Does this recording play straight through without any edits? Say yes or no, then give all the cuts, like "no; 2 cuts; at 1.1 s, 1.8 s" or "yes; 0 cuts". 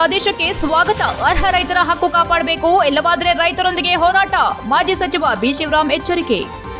yes; 0 cuts